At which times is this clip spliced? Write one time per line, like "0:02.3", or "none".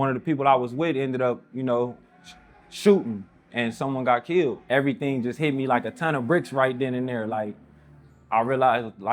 0:04.6